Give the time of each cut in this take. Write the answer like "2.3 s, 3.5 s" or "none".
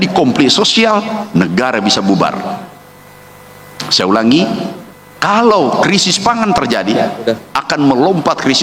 none